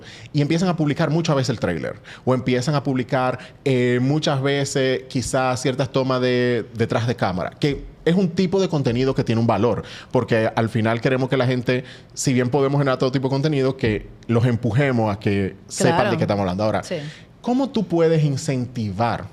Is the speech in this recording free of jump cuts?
yes; 0 cuts

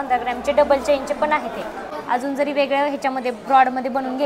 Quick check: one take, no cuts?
no; 1 cut; at 1.9 s

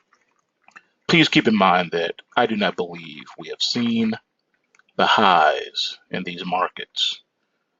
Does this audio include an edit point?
yes; 1 cut; at 5.1 s

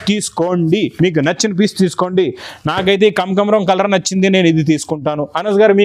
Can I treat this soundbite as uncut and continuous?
yes; 0 cuts

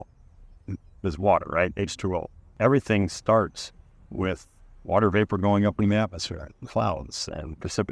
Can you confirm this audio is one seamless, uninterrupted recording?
no; 1 cut; at 2.6 s

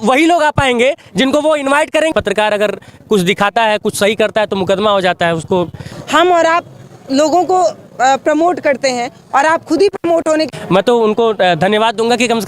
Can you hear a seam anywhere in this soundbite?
yes; 3 cuts; at 2.1 s, 5.9 s, 10.5 s

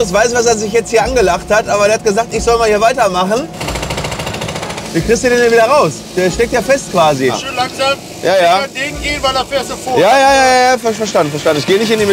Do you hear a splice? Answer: yes; 3 cuts; at 3.6 s, 4.8 s, 7.4 s

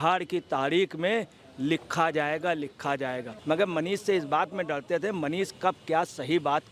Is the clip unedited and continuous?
no; 1 cut; at 3.3 s

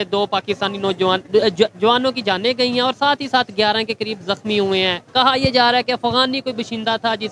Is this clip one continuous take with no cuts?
yes; 0 cuts

